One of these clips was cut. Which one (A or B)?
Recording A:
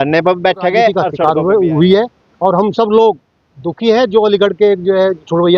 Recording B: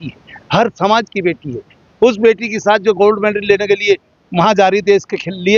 A